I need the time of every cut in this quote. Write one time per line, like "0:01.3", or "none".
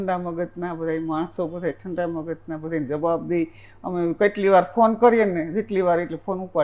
none